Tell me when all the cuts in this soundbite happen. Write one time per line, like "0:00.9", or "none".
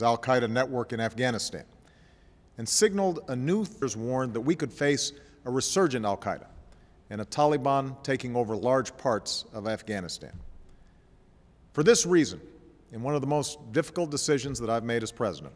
none

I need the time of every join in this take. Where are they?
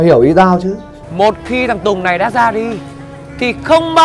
0:01.0

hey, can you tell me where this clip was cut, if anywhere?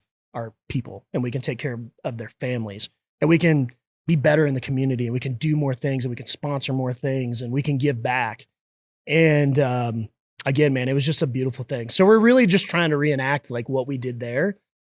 none

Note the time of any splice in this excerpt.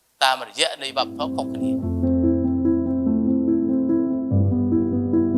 0:01.2

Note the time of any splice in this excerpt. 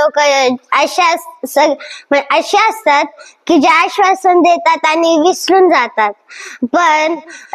none

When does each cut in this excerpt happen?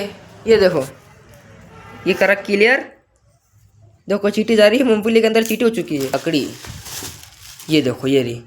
0:06.1

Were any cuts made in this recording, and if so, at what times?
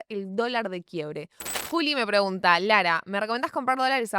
0:01.7

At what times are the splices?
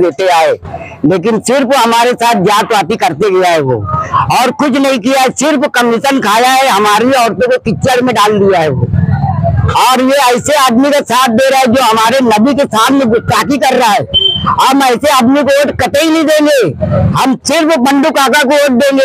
none

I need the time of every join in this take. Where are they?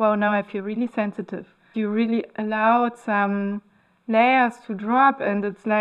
0:01.7

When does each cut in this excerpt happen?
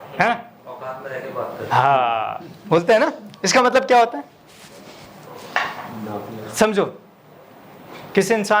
none

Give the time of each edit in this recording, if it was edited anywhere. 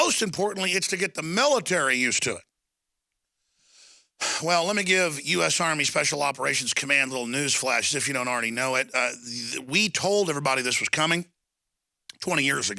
0:10.2

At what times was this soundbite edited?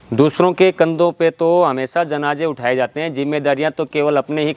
none

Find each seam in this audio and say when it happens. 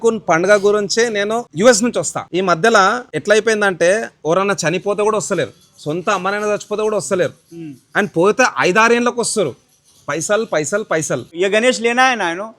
0:01.5
0:02.2
0:03.1
0:11.3

